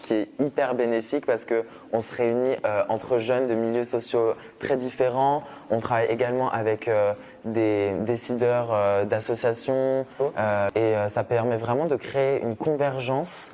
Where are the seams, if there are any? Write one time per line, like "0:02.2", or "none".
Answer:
0:10.7